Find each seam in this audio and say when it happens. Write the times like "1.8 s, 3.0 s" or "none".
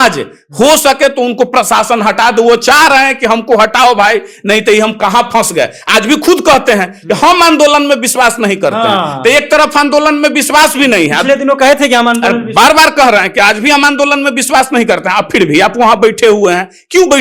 none